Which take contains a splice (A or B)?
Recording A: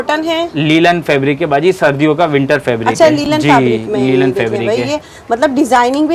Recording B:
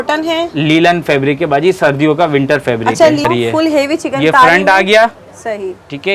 B